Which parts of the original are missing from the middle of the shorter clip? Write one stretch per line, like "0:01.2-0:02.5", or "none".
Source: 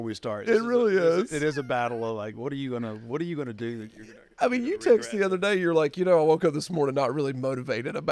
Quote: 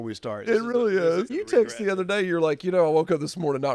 0:01.3-0:04.6